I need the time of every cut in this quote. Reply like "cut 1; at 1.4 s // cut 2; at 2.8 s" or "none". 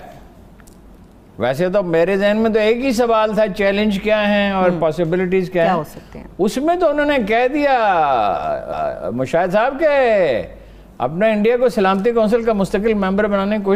none